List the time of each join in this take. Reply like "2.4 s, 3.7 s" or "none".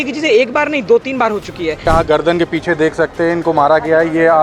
1.9 s

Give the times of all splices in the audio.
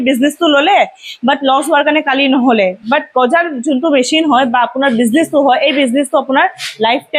none

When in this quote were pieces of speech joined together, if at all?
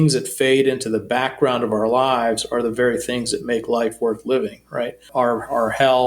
5.1 s

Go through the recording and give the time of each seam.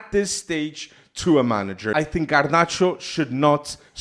1.9 s

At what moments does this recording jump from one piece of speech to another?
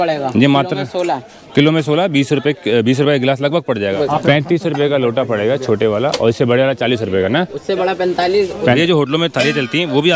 4.0 s, 8.8 s

